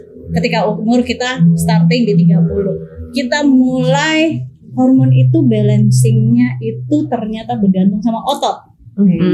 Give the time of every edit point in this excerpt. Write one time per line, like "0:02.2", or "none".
none